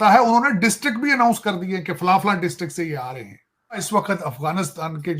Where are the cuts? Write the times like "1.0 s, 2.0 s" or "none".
3.9 s